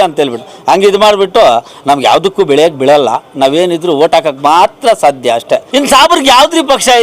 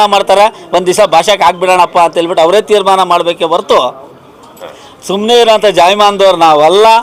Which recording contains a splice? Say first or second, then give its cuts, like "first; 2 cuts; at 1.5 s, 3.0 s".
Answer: first; 1 cut; at 5.7 s